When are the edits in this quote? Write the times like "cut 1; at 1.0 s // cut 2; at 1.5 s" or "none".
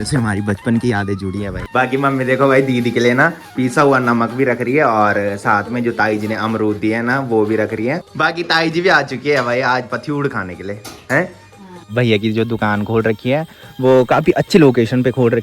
cut 1; at 1.6 s // cut 2; at 8.1 s // cut 3; at 11.9 s